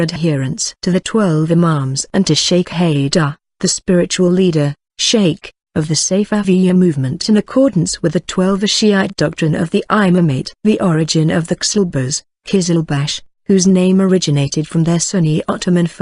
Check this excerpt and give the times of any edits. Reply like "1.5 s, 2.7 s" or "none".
6.4 s